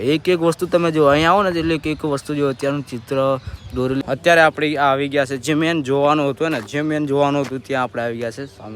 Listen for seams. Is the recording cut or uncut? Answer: cut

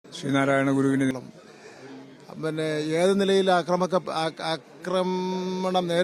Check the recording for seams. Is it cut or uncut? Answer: cut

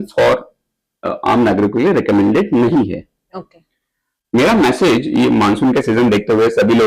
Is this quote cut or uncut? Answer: uncut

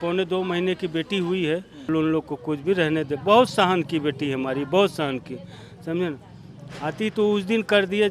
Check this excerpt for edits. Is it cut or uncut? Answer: cut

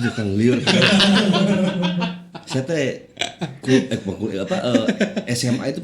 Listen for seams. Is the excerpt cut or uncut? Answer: uncut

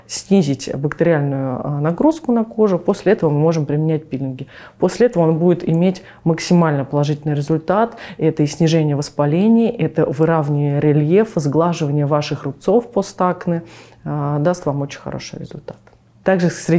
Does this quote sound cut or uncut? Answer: uncut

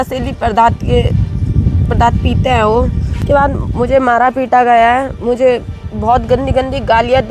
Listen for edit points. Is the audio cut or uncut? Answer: cut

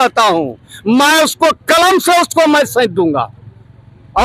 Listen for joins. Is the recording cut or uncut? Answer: uncut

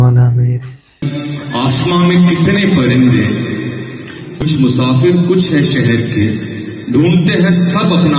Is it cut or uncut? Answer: cut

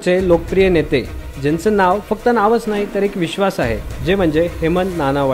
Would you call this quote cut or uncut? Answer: uncut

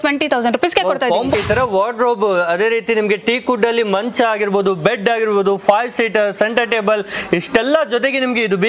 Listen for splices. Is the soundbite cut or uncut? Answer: cut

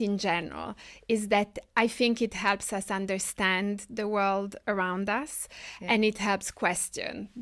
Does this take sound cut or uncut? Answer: uncut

